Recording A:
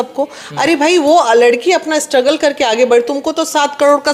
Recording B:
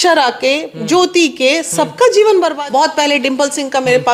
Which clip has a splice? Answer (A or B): B